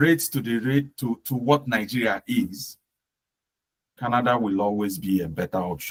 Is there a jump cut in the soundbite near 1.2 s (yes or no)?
no